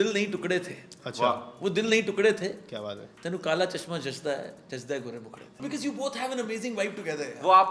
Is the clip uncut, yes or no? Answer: no